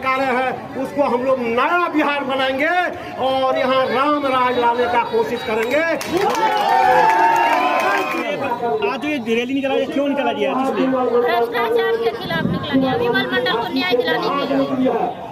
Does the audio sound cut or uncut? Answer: uncut